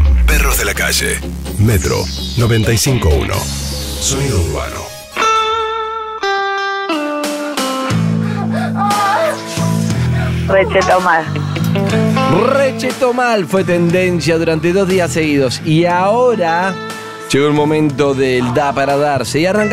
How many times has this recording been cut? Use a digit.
1